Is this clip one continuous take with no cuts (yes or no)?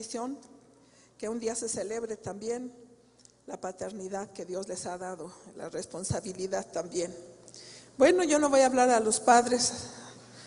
yes